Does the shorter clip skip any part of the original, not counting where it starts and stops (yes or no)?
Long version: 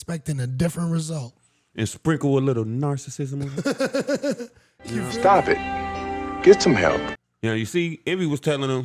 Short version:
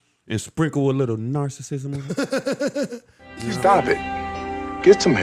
yes